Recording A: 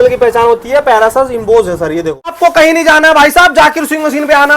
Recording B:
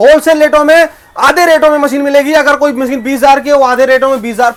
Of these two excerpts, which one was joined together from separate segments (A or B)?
A